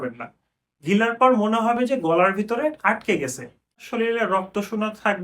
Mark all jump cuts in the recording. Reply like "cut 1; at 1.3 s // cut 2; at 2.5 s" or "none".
cut 1; at 3.8 s